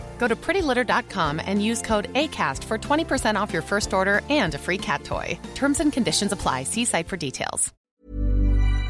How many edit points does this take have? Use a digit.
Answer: 1